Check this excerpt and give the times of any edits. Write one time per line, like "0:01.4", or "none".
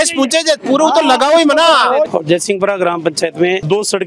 0:02.1

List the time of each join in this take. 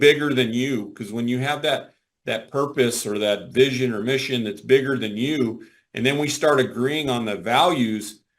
none

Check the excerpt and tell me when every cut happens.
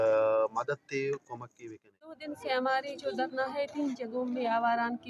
0:02.3

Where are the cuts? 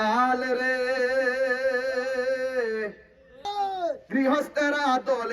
0:03.4

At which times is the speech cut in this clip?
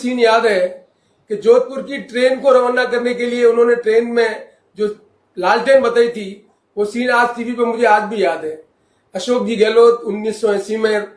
none

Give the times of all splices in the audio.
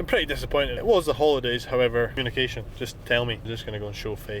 0:00.7
0:02.1
0:03.4

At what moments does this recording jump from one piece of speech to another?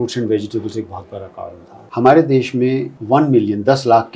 0:01.7
0:02.9

